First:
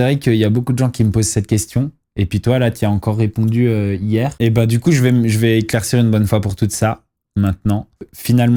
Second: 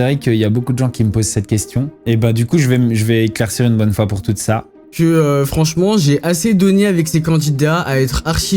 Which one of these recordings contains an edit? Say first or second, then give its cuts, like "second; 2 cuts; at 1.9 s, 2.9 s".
second; 2 cuts; at 2.0 s, 4.9 s